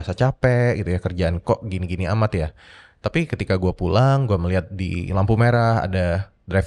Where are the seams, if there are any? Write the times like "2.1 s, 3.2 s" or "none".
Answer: none